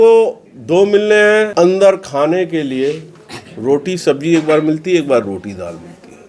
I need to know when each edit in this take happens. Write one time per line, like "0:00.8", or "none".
0:01.5